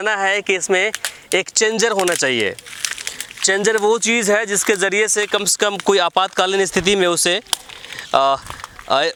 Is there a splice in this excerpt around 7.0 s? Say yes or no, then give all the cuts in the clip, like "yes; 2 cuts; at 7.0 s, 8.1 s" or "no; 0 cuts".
no; 0 cuts